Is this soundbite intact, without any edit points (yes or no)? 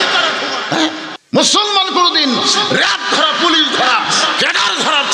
no